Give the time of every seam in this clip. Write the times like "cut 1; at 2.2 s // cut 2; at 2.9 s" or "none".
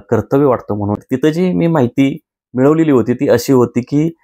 cut 1; at 1.0 s